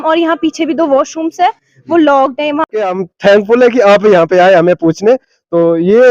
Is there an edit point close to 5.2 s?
no; 1 cut; at 2.6 s

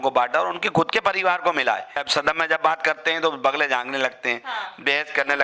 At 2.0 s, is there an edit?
yes; 1 cut; at 2.0 s

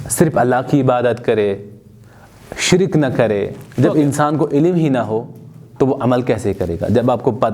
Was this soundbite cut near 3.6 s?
yes; 1 cut; at 3.6 s

